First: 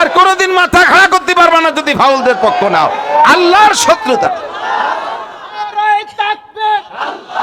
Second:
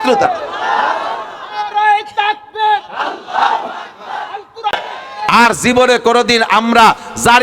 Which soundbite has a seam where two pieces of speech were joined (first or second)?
second